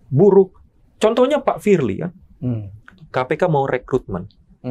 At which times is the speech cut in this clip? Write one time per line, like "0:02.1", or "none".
0:03.0